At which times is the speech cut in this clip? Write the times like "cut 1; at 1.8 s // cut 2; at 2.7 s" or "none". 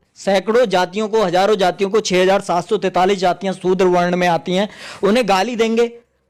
none